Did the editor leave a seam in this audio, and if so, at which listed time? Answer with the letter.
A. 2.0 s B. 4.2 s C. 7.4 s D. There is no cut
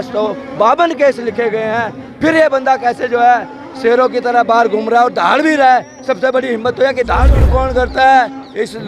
C